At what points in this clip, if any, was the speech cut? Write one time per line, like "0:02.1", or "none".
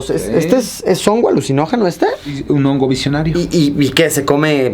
0:02.3
0:03.3